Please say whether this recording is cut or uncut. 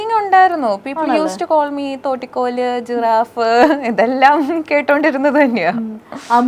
uncut